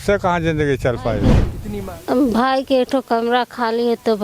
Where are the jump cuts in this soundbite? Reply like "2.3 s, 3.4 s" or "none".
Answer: 1.5 s